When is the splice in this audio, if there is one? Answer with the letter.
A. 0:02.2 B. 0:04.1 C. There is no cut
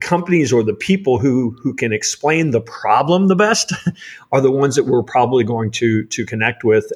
C